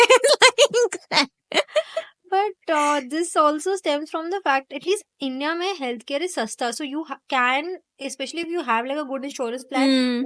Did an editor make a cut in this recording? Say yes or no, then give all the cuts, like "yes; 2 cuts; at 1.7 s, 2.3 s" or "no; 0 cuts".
no; 0 cuts